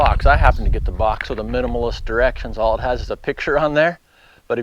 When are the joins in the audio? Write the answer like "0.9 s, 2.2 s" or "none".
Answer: none